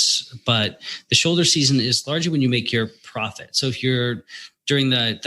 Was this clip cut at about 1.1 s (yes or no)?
no